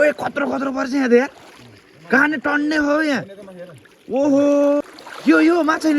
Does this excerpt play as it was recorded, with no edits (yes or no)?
no